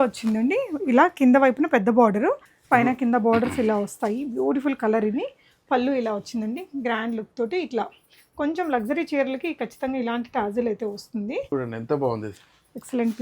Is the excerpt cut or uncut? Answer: cut